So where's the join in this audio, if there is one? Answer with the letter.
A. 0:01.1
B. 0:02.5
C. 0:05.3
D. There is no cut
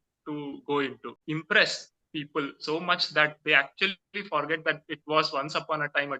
A